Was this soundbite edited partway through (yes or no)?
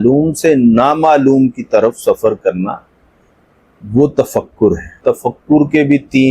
yes